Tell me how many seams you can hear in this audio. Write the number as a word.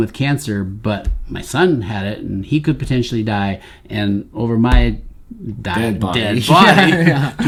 zero